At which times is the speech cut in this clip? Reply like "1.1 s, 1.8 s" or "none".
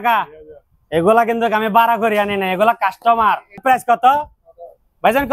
3.6 s